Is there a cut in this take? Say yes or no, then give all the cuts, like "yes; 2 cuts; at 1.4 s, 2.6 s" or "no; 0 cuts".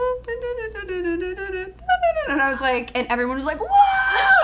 no; 0 cuts